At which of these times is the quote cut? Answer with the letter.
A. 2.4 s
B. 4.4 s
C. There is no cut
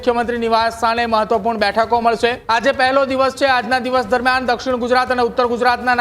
A